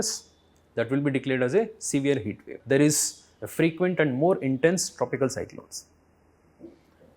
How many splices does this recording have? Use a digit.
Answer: 1